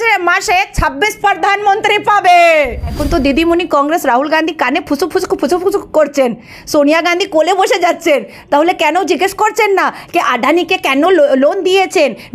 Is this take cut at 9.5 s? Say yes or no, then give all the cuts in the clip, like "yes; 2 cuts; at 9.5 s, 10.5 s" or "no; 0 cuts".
no; 1 cut; at 3.0 s